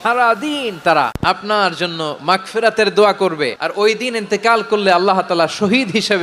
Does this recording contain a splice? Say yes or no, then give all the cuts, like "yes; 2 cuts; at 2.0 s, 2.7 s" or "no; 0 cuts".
yes; 2 cuts; at 1.2 s, 3.6 s